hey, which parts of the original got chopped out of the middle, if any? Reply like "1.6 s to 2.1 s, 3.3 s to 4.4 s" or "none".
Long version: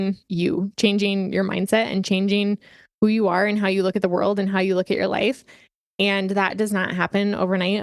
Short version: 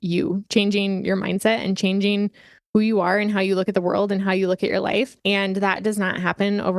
5.4 s to 5.9 s